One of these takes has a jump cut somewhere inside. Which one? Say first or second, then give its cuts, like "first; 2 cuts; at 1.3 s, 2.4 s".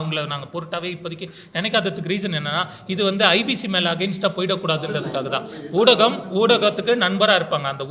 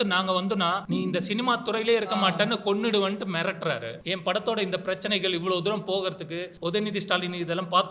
second; 3 cuts; at 0.8 s, 4.0 s, 6.5 s